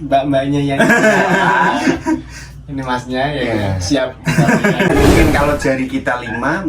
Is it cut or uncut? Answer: cut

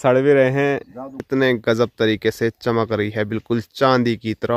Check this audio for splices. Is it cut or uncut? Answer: cut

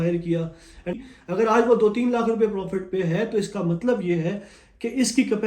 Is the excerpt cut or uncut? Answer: cut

